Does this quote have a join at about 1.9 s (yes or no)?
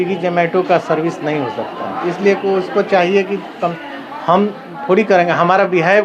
no